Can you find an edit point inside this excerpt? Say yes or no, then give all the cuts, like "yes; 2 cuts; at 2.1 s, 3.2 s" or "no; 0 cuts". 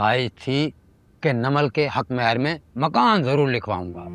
no; 0 cuts